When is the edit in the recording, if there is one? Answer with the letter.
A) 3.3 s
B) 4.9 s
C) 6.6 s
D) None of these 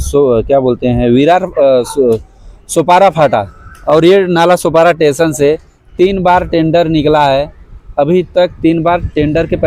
D